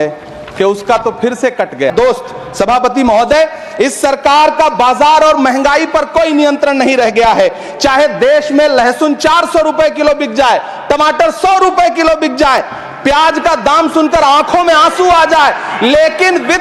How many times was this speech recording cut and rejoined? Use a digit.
1